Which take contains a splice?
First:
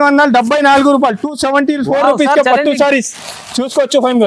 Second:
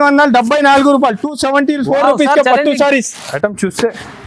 second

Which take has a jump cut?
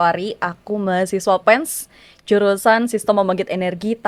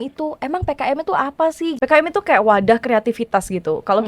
second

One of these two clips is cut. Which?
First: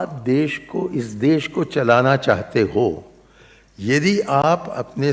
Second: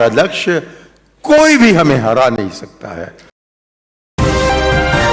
second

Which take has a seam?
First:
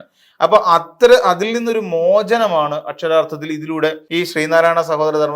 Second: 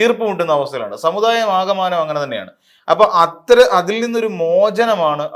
first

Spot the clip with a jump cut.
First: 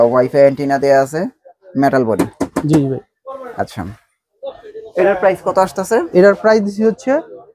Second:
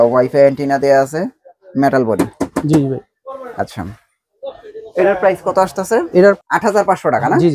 second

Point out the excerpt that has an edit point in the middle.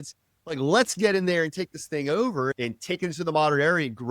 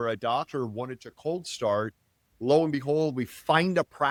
first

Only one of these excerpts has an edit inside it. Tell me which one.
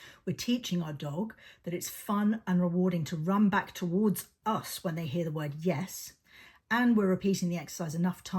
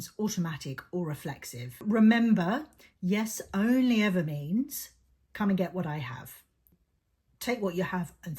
second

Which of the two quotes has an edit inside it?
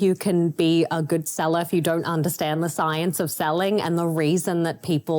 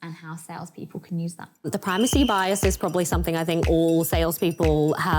second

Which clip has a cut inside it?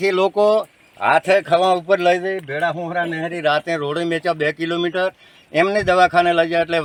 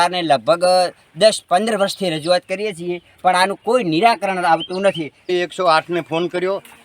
second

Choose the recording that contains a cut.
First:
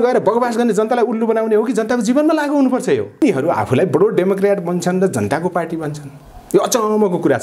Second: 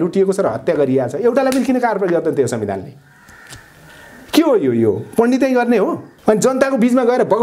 first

